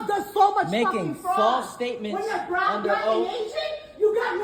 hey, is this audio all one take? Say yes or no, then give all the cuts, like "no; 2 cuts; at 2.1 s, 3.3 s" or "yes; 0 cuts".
yes; 0 cuts